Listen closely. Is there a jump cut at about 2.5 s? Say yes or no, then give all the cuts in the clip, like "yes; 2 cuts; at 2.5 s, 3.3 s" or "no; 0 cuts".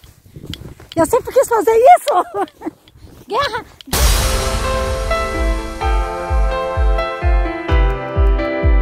no; 1 cut; at 3.8 s